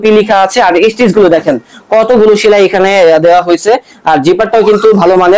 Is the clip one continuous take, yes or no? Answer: yes